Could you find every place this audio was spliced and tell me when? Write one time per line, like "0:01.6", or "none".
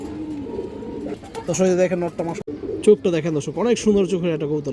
0:02.4